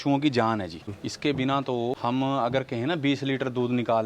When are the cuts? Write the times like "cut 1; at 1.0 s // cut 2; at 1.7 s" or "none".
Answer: cut 1; at 1.0 s // cut 2; at 2.0 s